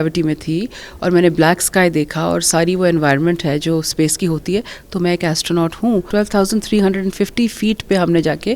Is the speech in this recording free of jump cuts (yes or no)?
no